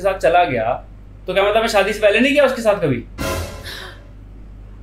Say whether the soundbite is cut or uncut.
uncut